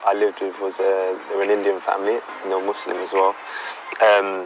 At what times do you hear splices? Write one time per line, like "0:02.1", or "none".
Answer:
none